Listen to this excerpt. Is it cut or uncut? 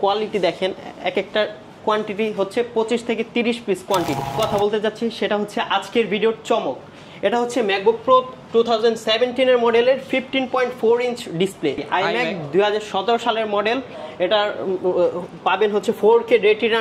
cut